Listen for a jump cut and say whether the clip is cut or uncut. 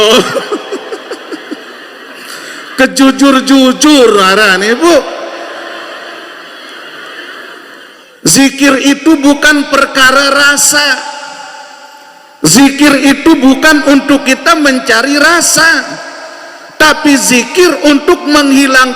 cut